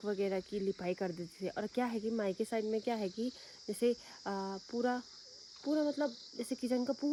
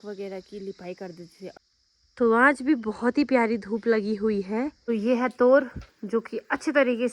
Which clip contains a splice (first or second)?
second